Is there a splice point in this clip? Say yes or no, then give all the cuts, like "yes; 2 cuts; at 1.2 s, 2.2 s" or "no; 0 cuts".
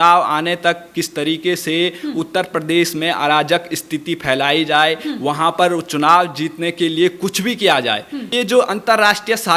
yes; 1 cut; at 8.3 s